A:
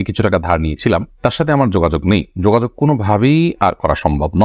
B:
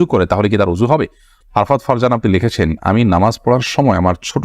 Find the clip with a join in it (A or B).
B